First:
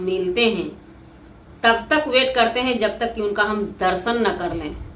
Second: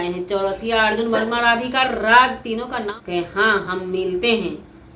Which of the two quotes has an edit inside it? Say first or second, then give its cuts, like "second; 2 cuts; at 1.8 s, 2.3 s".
second; 1 cut; at 3.0 s